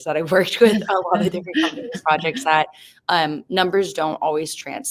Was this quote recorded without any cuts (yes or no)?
yes